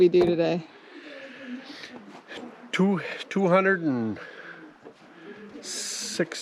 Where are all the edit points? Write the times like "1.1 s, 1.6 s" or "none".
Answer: none